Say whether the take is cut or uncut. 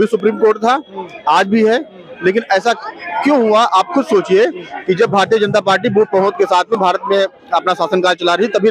uncut